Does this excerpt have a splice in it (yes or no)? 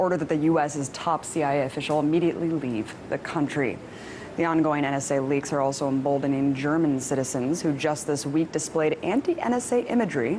yes